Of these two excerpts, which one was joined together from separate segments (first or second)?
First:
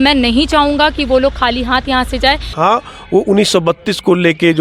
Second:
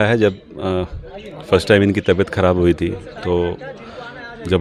first